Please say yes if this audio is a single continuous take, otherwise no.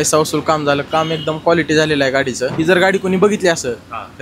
no